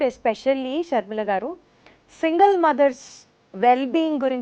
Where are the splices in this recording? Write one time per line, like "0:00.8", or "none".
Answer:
none